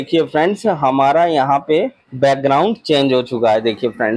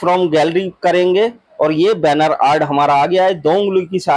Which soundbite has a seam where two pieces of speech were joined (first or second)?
first